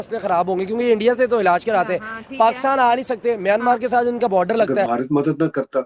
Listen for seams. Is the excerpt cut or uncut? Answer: cut